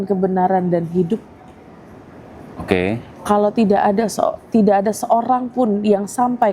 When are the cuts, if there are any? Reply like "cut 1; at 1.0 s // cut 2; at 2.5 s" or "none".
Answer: none